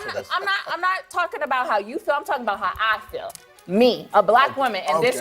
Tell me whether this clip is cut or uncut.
cut